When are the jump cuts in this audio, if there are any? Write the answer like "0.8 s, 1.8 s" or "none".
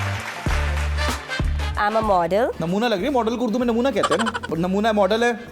1.8 s, 2.6 s, 4.5 s